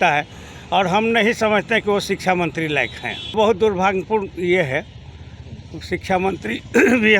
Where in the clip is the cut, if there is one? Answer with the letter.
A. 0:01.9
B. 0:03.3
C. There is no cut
B